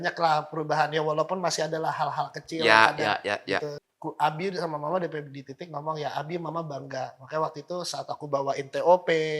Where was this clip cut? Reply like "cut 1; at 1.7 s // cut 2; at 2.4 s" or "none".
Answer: cut 1; at 3.8 s